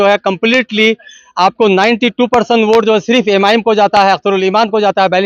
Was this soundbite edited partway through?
no; 0 cuts

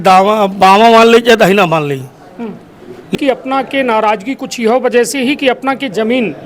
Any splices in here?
yes; 1 cut; at 3.1 s

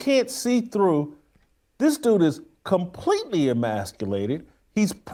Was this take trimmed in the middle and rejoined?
no; 0 cuts

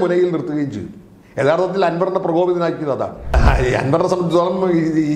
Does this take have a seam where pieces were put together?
yes; 1 cut; at 3.4 s

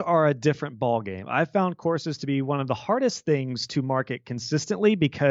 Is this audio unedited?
yes; 0 cuts

